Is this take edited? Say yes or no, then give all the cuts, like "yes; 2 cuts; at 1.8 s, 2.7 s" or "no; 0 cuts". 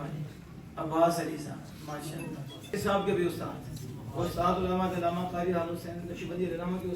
yes; 1 cut; at 2.7 s